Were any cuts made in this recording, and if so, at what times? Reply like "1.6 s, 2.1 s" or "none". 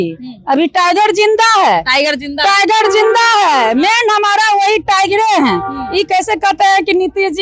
none